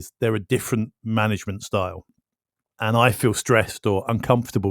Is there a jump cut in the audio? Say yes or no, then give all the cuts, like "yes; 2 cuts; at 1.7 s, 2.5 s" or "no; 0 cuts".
yes; 1 cut; at 2.7 s